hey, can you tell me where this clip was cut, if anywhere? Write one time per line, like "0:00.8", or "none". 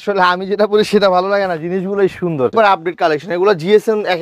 0:02.5